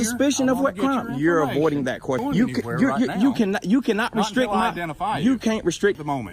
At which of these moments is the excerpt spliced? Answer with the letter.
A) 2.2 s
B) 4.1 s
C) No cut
A